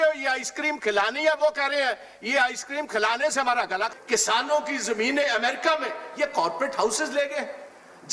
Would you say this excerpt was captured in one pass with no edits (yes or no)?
no